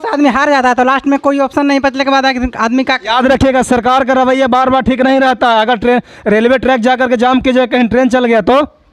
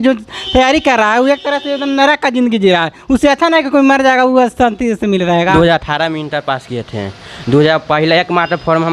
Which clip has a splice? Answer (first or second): second